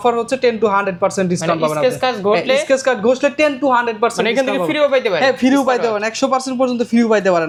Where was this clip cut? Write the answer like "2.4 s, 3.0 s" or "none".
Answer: none